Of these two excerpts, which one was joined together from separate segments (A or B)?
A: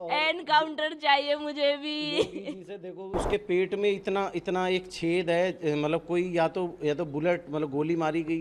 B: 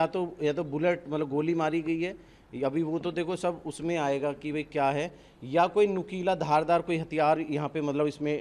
A